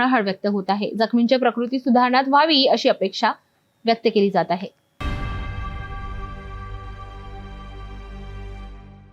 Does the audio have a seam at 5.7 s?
yes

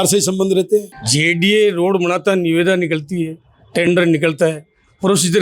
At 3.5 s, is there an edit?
no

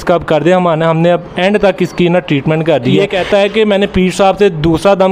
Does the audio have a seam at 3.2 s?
yes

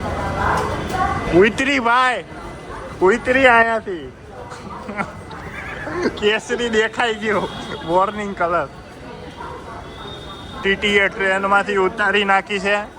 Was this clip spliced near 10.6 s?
yes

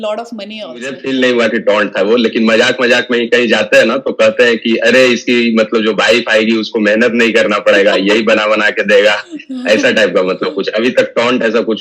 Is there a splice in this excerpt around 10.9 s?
no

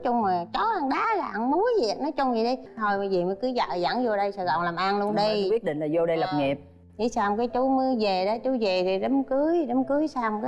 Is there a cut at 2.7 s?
yes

